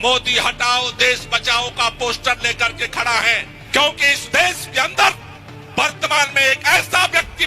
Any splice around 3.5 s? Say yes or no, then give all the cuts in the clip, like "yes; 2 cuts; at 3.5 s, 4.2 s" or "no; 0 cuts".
yes; 1 cut; at 3.5 s